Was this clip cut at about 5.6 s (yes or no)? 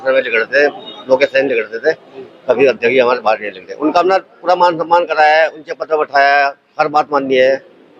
no